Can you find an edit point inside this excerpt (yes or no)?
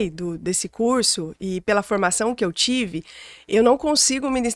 no